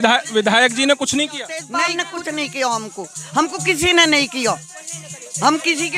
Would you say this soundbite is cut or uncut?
cut